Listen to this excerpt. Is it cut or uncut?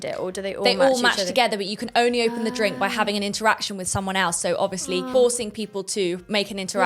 cut